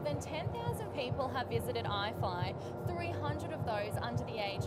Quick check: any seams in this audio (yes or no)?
no